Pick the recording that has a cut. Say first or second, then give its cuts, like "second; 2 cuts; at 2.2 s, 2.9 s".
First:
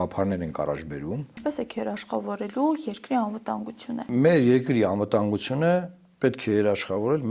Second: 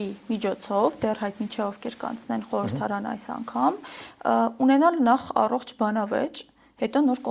first; 2 cuts; at 1.4 s, 4.1 s